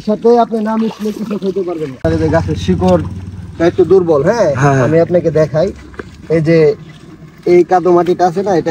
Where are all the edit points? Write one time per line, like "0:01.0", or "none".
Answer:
0:02.0